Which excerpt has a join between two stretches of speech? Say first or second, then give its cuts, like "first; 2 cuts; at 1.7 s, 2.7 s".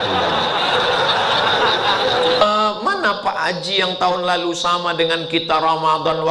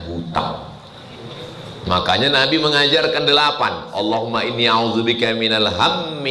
first; 1 cut; at 2.4 s